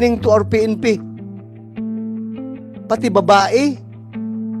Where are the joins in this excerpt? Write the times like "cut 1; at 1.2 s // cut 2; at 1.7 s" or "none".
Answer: cut 1; at 1.0 s // cut 2; at 2.7 s // cut 3; at 3.8 s